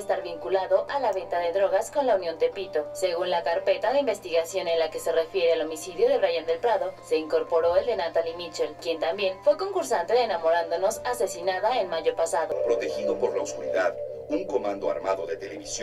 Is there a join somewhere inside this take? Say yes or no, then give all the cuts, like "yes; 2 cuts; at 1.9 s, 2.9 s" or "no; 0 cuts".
yes; 1 cut; at 12.6 s